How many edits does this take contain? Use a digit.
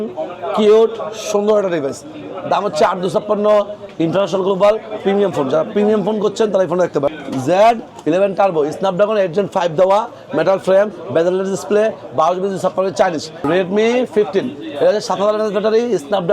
3